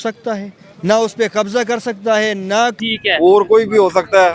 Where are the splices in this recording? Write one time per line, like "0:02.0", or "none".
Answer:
0:02.8

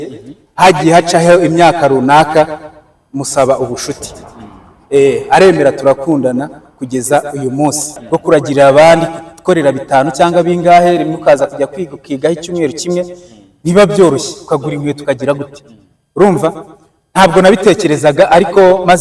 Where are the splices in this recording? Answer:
0:08.0

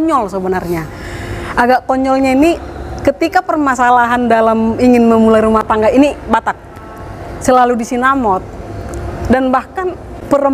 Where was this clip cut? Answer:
none

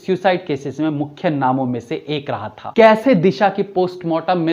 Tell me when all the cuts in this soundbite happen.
0:02.5

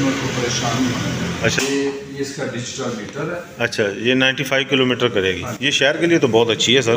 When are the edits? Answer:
0:01.6

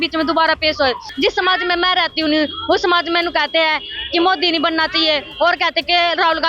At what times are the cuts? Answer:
0:01.1

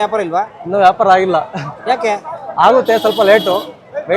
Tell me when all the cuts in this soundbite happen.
none

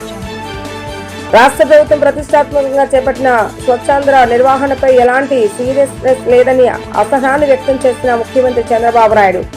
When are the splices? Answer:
0:01.0

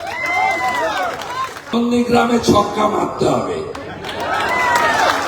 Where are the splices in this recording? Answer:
0:01.7

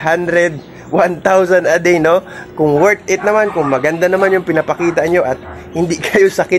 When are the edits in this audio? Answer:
none

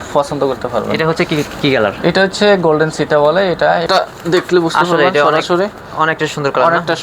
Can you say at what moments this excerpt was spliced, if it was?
0:03.8

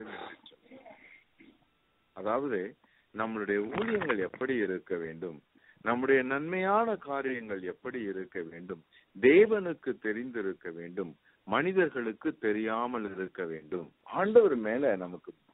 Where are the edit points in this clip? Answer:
0:14.0

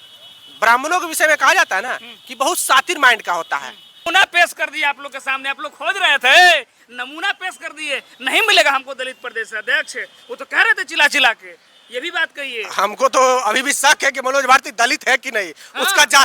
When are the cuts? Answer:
0:04.0

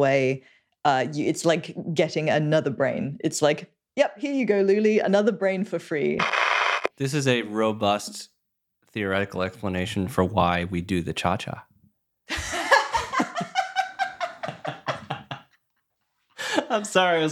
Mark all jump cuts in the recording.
0:06.7

